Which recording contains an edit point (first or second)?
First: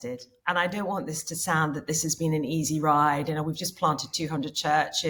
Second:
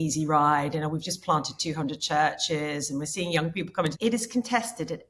second